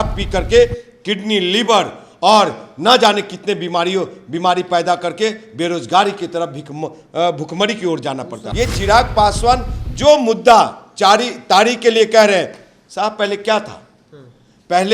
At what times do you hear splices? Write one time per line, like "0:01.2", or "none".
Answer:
0:08.4